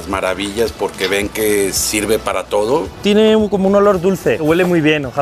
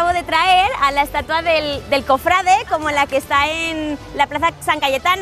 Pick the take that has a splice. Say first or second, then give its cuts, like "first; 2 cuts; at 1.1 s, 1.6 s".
first; 1 cut; at 2.9 s